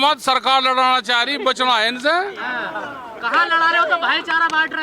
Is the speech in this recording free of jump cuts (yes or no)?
yes